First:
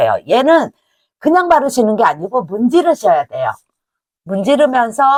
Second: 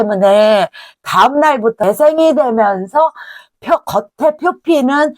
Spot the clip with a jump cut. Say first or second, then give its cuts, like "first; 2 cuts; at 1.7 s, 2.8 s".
second; 1 cut; at 1.8 s